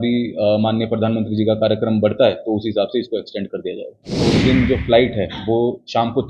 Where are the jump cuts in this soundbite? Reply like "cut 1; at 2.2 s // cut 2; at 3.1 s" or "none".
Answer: cut 1; at 4.3 s